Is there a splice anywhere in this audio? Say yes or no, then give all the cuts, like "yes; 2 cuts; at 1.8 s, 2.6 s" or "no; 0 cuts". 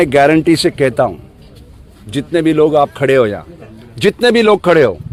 no; 0 cuts